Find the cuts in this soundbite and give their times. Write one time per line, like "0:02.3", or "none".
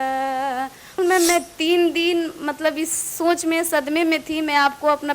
0:00.9